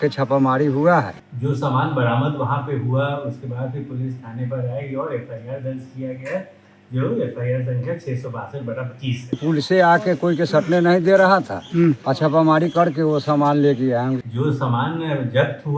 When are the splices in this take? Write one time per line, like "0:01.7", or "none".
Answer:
0:01.1
0:09.4
0:12.1
0:14.3